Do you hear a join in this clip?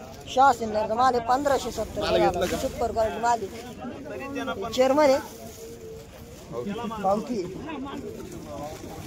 no; 0 cuts

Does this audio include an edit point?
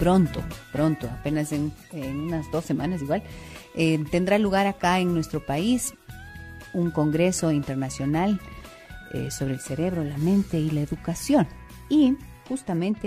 yes; 1 cut; at 9.9 s

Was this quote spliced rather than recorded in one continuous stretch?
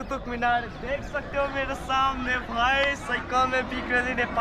no; 0 cuts

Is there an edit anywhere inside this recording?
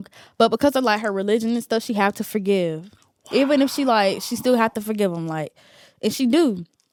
no; 0 cuts

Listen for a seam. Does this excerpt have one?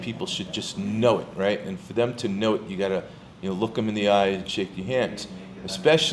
no; 0 cuts

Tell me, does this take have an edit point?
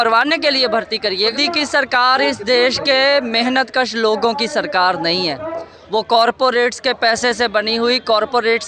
yes; 1 cut; at 1.3 s

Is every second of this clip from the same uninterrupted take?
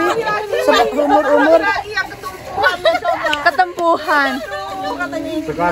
yes; 0 cuts

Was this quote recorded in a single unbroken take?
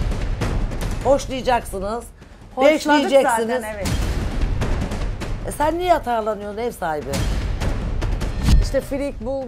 yes; 0 cuts

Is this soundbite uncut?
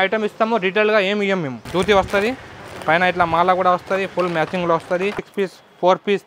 no; 2 cuts; at 1.6 s, 5.2 s

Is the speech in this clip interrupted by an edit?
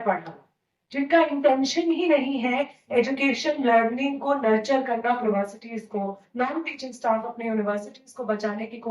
yes; 1 cut; at 5.3 s

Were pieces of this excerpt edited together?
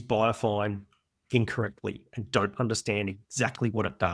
no; 0 cuts

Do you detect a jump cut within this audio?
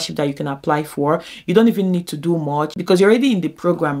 yes; 1 cut; at 2.8 s

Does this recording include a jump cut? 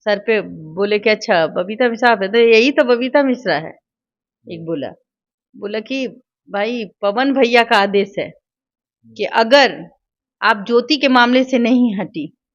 no; 0 cuts

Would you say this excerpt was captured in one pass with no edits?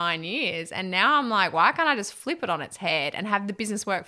yes; 0 cuts

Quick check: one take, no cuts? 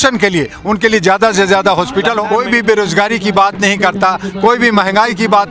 no; 1 cut; at 2.2 s

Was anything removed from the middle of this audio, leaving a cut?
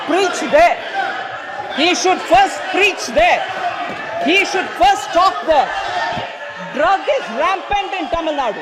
no; 0 cuts

